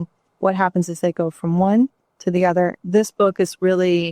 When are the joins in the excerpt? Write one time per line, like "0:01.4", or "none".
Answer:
0:02.8